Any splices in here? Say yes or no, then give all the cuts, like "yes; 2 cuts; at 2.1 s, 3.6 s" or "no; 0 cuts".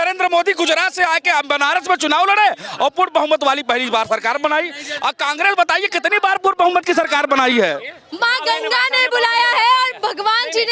no; 0 cuts